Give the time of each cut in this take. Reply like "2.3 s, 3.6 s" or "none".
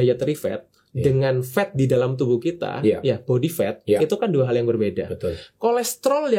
none